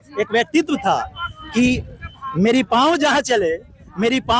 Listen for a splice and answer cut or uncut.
uncut